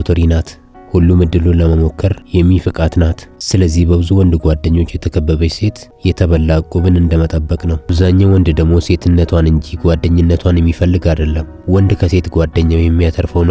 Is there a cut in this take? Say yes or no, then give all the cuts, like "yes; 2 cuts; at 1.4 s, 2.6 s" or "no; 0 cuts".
yes; 3 cuts; at 3.3 s, 5.8 s, 7.9 s